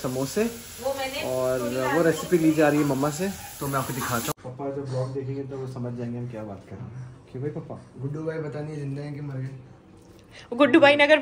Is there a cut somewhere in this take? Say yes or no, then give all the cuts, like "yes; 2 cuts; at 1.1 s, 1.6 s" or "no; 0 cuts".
yes; 1 cut; at 4.4 s